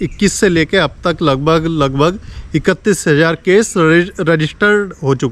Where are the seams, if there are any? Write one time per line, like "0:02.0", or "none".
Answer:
none